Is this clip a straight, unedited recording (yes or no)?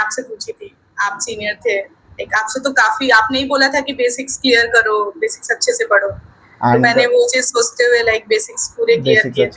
yes